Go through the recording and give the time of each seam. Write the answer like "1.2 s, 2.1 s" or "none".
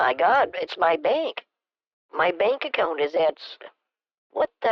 none